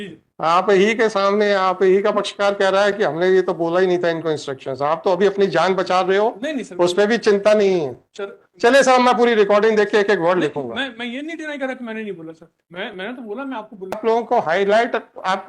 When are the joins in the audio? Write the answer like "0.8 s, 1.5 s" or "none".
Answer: 14.0 s